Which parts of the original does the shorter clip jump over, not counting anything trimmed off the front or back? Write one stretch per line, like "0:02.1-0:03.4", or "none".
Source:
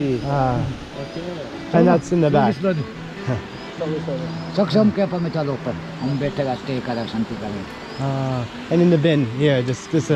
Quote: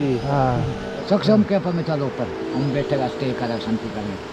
0:00.9-0:04.4